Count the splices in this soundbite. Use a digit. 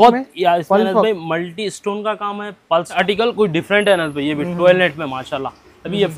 1